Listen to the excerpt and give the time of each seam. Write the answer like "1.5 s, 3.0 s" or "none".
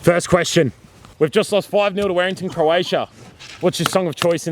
1.0 s